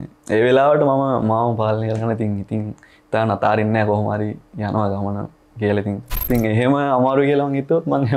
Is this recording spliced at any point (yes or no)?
yes